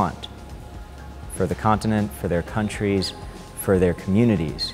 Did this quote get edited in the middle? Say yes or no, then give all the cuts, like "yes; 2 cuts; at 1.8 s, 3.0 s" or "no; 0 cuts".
no; 0 cuts